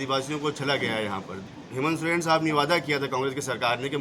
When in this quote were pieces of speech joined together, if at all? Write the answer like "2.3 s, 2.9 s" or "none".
1.5 s